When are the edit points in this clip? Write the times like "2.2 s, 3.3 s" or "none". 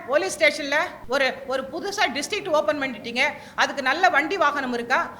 1.0 s